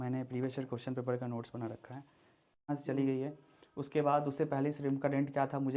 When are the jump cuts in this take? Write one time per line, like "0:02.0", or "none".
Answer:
0:02.6